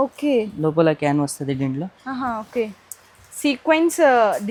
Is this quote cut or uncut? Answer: uncut